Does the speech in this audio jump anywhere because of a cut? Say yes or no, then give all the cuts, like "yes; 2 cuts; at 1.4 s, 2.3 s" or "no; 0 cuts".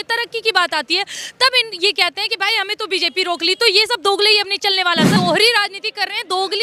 yes; 1 cut; at 5.1 s